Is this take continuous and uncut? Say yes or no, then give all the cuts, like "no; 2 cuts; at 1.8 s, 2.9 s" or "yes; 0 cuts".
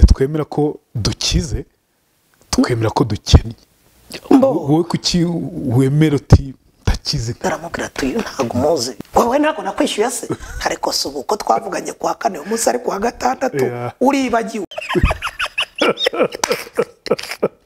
no; 3 cuts; at 7.4 s, 9.0 s, 14.7 s